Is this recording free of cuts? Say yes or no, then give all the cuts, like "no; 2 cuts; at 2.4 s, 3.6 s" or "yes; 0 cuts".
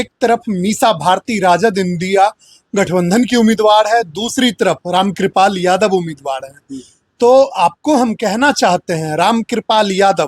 yes; 0 cuts